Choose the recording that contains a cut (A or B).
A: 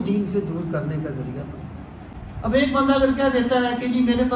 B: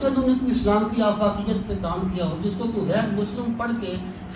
A